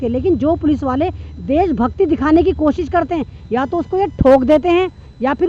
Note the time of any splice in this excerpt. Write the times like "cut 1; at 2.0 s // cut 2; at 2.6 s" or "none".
none